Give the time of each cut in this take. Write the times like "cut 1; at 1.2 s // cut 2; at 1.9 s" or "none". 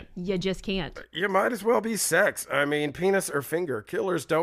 cut 1; at 1.2 s